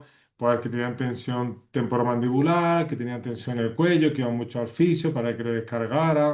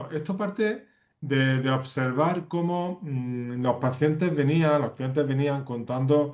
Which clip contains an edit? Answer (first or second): second